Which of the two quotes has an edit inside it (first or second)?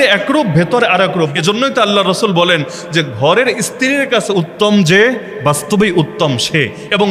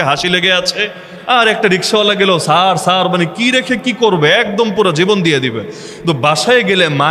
first